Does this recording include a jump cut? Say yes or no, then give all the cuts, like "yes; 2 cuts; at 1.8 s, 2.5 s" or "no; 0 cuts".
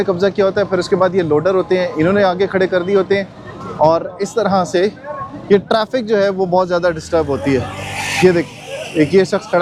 no; 0 cuts